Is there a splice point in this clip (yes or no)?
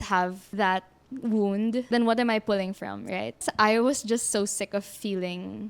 yes